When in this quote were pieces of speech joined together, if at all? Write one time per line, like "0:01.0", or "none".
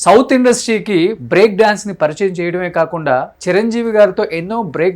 none

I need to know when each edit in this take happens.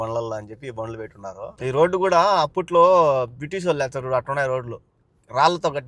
0:01.5

